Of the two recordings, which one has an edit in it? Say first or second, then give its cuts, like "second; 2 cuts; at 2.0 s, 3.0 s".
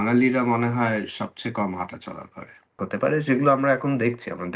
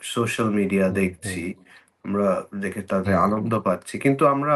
first; 1 cut; at 2.7 s